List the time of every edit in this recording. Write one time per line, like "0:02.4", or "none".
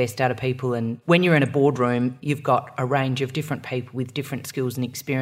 0:00.9
0:02.2